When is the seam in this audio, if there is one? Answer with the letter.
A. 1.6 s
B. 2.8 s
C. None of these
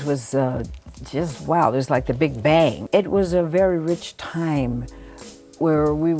B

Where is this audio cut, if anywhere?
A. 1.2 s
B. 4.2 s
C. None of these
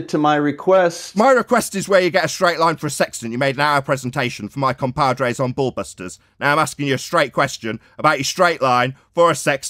C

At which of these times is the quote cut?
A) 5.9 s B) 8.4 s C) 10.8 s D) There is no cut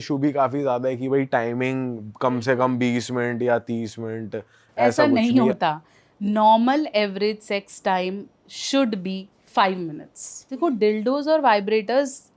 C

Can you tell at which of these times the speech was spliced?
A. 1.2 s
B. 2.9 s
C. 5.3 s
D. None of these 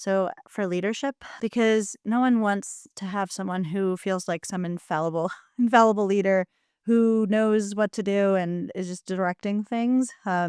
A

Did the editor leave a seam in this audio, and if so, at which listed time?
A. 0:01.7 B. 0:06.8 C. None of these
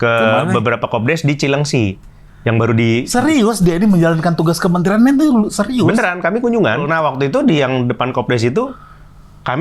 B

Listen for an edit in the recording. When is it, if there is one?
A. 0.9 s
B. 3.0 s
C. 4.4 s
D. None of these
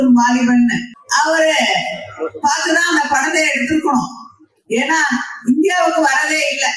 A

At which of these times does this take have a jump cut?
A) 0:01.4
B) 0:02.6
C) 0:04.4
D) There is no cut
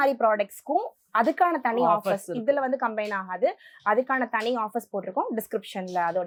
D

